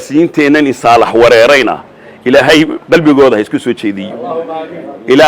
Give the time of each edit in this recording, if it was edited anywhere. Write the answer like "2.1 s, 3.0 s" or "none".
none